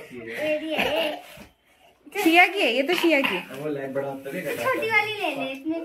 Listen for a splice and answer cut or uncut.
uncut